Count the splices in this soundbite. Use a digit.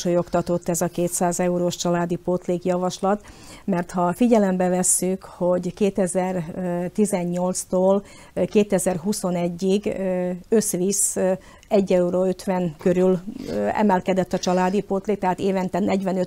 0